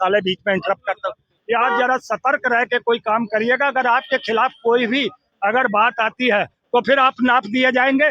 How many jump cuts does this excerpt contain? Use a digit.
1